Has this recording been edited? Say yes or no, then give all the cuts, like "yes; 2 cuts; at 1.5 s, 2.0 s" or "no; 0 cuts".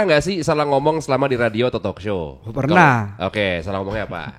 no; 0 cuts